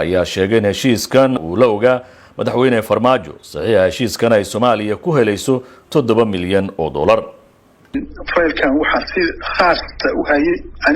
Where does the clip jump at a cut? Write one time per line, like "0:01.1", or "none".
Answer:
0:01.4

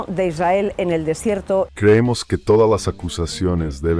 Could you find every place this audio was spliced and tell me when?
0:01.7

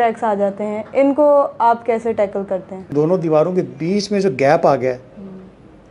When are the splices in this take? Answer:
0:02.9

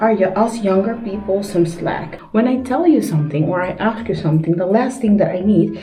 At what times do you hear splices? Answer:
0:02.1

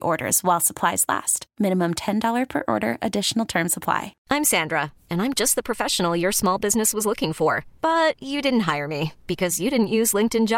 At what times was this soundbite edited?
0:04.1

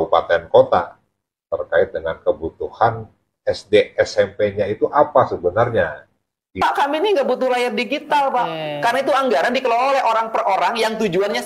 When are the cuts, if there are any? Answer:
0:06.5

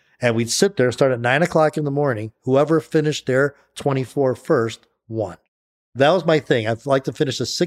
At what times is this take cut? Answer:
0:05.4

